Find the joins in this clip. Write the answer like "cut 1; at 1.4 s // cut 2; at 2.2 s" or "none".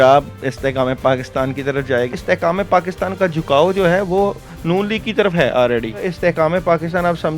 cut 1; at 2.1 s // cut 2; at 6.1 s